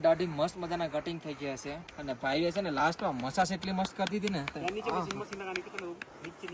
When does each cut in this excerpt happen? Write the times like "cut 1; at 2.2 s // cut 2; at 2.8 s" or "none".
cut 1; at 1.9 s

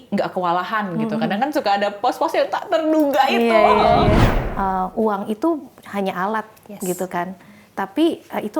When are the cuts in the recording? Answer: cut 1; at 4.2 s

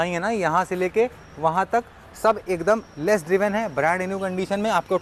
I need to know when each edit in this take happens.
none

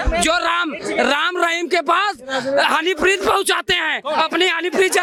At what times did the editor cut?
none

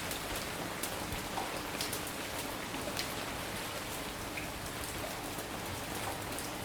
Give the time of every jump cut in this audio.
none

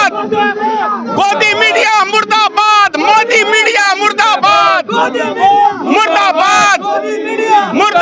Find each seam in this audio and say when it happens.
none

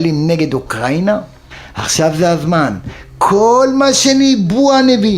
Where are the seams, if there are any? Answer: cut 1; at 1.3 s

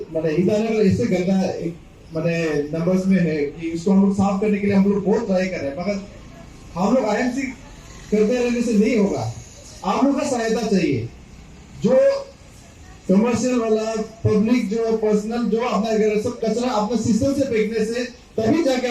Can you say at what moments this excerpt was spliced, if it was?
none

